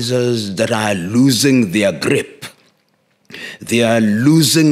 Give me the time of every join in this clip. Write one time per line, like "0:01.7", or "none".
none